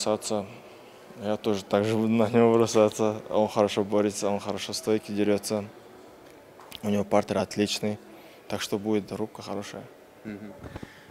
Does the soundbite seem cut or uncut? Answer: uncut